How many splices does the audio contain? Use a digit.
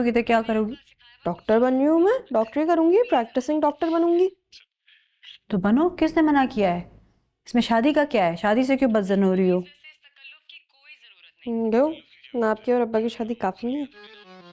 0